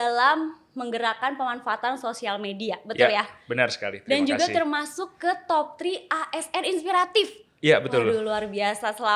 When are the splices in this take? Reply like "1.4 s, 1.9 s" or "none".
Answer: none